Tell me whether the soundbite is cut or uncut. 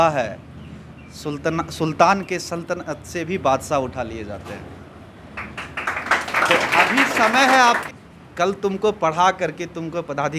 cut